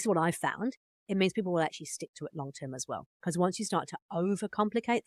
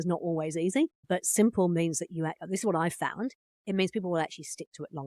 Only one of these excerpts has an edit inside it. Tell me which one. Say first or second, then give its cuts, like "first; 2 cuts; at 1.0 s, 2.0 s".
second; 1 cut; at 1.0 s